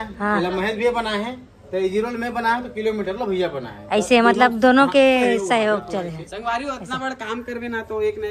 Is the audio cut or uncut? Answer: uncut